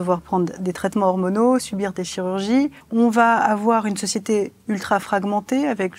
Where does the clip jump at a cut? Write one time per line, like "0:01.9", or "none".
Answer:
0:02.8